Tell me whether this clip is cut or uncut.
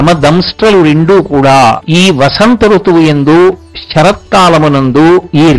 cut